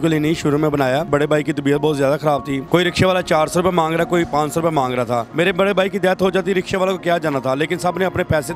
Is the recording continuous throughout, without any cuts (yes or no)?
no